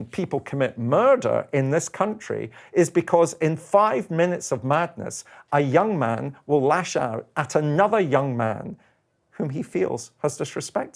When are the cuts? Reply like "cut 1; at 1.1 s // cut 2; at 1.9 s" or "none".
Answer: none